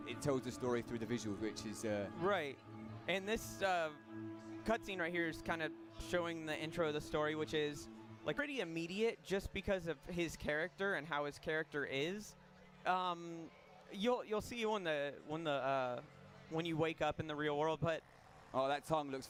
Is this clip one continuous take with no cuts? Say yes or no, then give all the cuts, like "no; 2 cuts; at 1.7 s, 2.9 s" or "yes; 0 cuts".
yes; 0 cuts